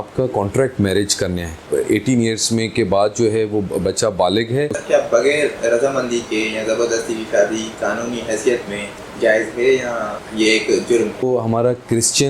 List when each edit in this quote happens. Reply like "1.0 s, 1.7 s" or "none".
1.7 s, 4.8 s, 9.0 s, 10.2 s, 11.2 s